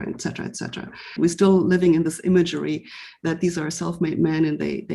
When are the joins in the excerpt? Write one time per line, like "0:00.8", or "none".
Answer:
0:01.1